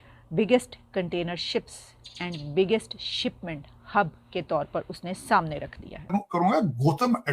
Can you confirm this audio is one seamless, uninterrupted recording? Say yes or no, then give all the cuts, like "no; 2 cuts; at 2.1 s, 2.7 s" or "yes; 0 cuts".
no; 1 cut; at 6.1 s